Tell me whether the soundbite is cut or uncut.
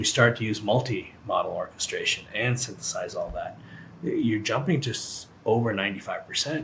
uncut